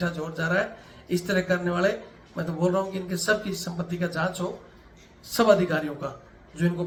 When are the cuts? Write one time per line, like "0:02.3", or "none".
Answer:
none